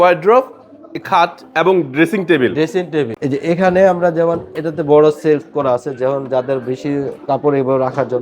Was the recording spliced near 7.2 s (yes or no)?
no